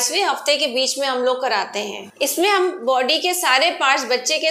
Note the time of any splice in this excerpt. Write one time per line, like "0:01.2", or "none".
0:02.0